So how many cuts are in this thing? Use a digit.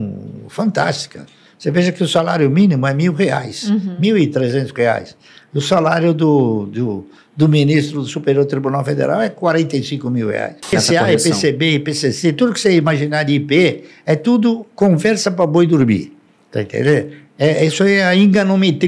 1